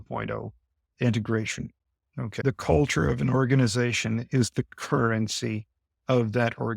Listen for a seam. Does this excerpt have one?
yes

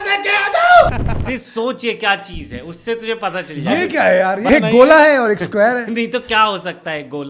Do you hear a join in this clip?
yes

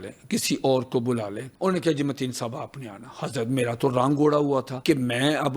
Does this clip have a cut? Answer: yes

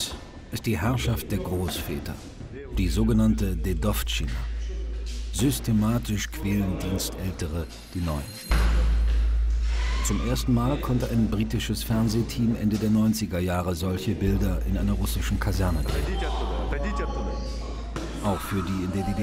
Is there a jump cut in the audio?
yes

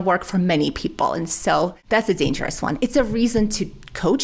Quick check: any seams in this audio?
yes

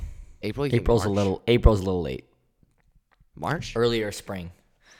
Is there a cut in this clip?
no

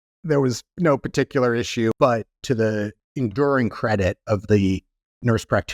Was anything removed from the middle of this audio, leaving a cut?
yes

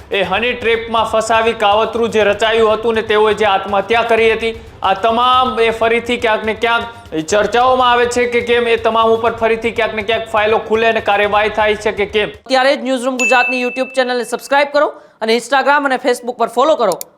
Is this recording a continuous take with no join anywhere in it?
no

